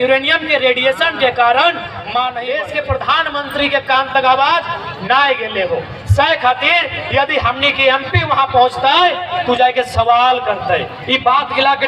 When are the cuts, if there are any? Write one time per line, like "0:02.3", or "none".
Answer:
0:02.6